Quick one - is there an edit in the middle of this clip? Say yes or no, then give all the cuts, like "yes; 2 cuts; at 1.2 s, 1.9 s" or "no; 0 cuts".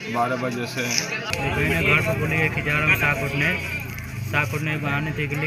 no; 0 cuts